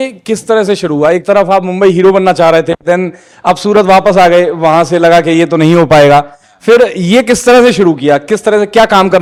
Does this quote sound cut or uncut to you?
uncut